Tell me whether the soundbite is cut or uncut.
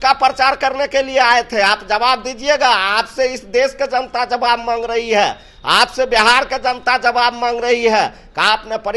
uncut